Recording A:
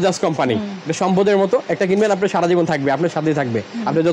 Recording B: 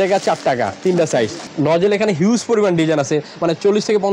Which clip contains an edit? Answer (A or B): B